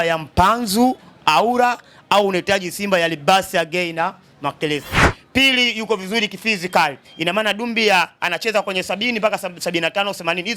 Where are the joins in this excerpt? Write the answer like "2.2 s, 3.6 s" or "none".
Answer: 5.0 s